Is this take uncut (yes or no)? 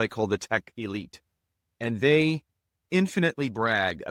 yes